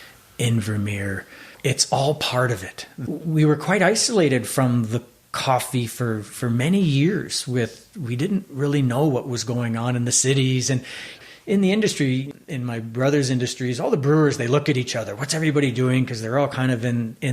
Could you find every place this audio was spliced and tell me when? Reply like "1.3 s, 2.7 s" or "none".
11.2 s, 12.3 s